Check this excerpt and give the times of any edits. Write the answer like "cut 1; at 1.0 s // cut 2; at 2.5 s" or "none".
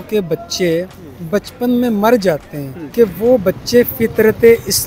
cut 1; at 2.8 s